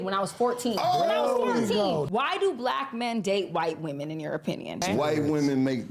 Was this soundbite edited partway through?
yes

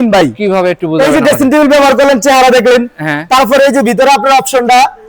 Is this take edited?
no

